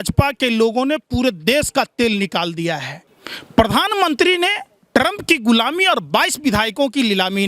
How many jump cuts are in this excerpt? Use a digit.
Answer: 1